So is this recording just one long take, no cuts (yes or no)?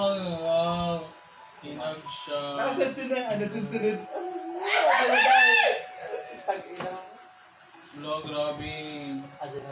yes